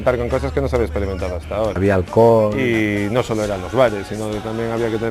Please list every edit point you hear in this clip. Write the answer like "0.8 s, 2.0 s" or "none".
1.8 s, 2.6 s